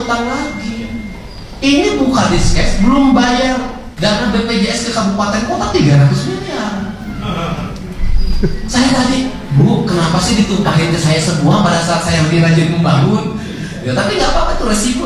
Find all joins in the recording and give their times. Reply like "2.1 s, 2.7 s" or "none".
none